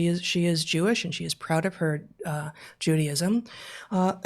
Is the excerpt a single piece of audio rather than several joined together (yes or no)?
yes